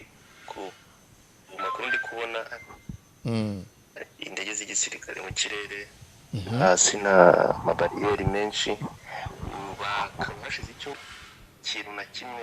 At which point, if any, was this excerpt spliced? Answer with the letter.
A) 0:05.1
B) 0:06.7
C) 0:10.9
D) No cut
C